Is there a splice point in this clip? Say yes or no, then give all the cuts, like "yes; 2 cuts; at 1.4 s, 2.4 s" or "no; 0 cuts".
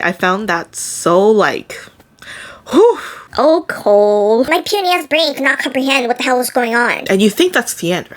yes; 2 cuts; at 4.5 s, 7.0 s